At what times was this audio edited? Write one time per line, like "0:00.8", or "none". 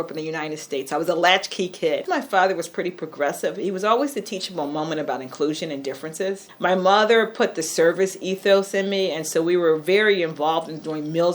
0:02.0
0:06.5